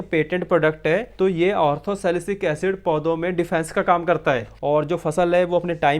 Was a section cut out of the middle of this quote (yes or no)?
yes